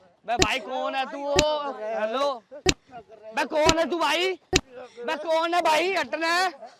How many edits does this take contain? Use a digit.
0